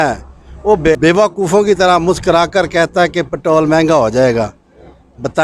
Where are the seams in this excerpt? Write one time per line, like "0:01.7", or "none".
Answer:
0:01.0